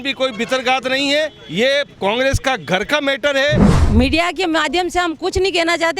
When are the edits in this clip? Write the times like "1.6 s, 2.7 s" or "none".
3.7 s